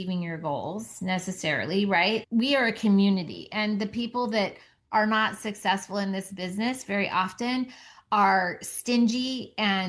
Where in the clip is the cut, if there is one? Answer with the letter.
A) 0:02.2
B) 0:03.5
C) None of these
A